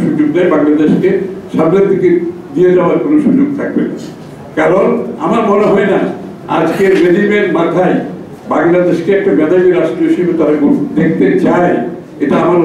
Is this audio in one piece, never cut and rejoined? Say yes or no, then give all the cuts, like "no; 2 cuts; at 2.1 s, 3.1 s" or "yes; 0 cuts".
yes; 0 cuts